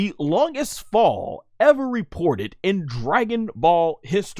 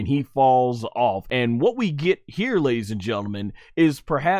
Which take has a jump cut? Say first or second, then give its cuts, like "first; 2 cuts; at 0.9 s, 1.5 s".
second; 1 cut; at 1.3 s